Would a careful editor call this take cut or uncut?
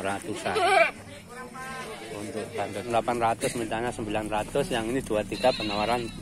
cut